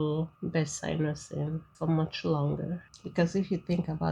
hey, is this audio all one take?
no; 1 cut; at 2.9 s

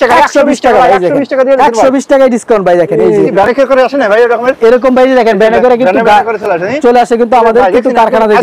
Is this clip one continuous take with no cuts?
no; 1 cut; at 3.3 s

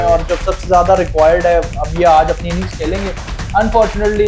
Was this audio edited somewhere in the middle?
no; 0 cuts

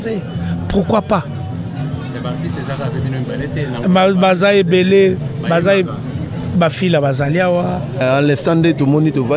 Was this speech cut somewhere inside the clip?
yes; 1 cut; at 8.0 s

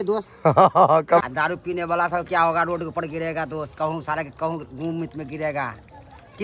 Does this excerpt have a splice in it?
yes; 1 cut; at 1.2 s

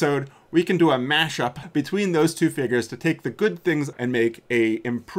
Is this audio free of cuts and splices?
no; 2 cuts; at 1.6 s, 3.9 s

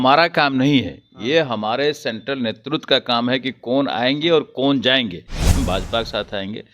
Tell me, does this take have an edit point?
yes; 1 cut; at 5.6 s

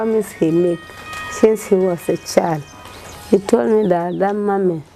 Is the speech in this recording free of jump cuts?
yes; 0 cuts

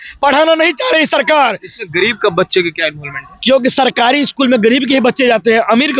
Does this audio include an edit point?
no; 0 cuts

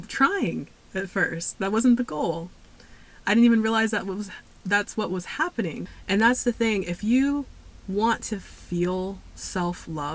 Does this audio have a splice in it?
yes; 1 cut; at 5.9 s

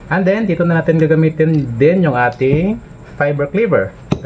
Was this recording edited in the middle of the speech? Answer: no; 0 cuts

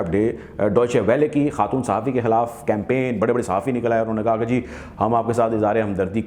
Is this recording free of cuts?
yes; 0 cuts

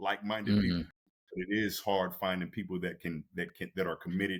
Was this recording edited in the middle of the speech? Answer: no; 0 cuts

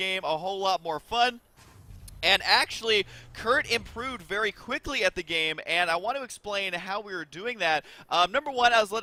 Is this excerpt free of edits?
yes; 0 cuts

